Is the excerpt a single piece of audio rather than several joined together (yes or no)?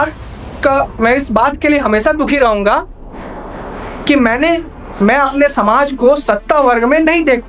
yes